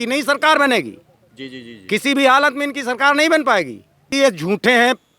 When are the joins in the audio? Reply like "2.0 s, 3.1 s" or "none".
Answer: none